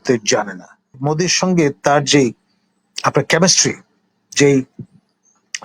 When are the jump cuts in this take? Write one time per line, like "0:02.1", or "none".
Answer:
0:00.9